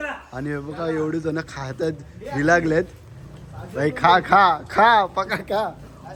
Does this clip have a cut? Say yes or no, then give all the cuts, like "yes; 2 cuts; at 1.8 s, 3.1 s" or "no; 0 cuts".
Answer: no; 0 cuts